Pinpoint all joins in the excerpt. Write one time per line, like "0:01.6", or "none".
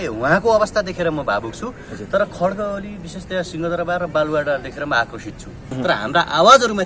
0:05.7